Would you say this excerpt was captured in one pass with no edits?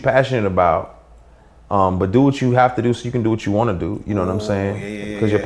yes; 0 cuts

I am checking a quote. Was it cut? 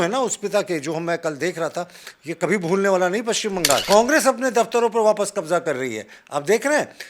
yes; 1 cut; at 3.8 s

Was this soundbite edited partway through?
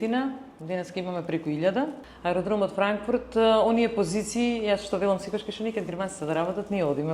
yes; 1 cut; at 2.1 s

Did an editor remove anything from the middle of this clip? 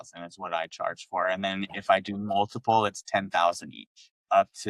no; 0 cuts

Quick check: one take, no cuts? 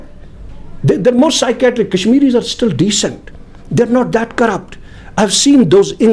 yes; 0 cuts

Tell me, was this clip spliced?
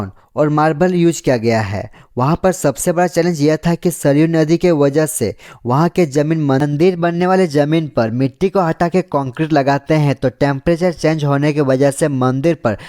yes; 1 cut; at 6.6 s

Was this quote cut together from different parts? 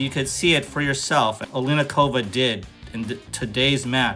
yes; 1 cut; at 1.4 s

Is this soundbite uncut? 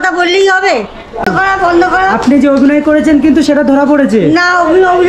no; 1 cut; at 1.3 s

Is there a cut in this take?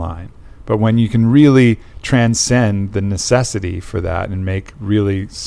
no; 0 cuts

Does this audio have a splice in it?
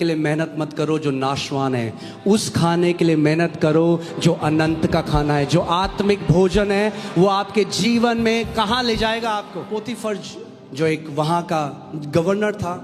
yes; 1 cut; at 9.6 s

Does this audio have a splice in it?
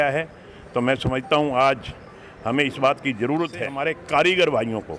yes; 1 cut; at 3.7 s

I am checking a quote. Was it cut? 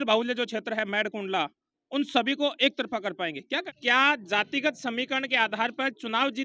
yes; 1 cut; at 3.7 s

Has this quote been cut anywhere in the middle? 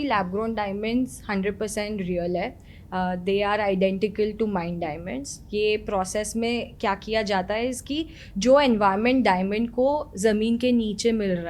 no; 0 cuts

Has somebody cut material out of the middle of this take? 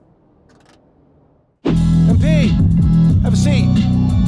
yes; 1 cut; at 1.7 s

